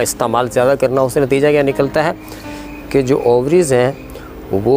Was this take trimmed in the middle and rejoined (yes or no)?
no